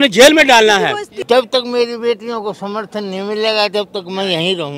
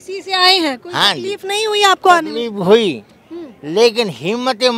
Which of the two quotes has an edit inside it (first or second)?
first